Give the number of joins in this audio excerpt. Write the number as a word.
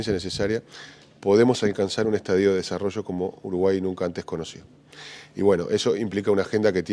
one